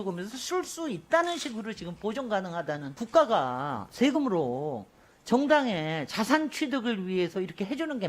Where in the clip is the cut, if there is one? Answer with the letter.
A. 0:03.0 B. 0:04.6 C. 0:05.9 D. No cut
A